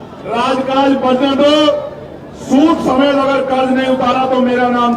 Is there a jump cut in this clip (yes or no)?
no